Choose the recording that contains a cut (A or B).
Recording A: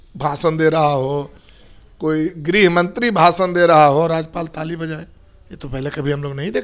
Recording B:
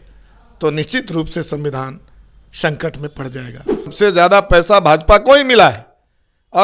B